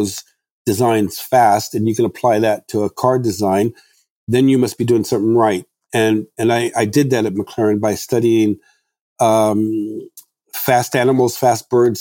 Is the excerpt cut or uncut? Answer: uncut